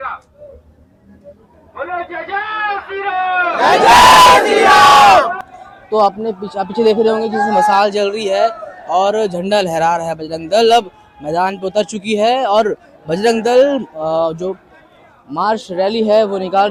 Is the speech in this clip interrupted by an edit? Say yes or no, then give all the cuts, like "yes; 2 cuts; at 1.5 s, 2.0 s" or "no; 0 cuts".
no; 0 cuts